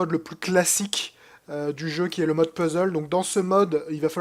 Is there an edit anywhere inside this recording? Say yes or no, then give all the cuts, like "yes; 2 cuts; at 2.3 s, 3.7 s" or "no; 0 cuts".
no; 0 cuts